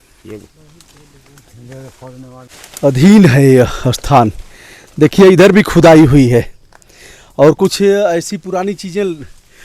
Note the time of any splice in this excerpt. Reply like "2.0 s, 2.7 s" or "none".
2.5 s